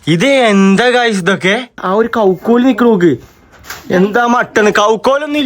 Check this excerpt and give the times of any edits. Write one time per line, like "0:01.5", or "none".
0:01.8